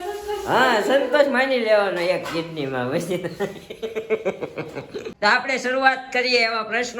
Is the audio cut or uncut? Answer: cut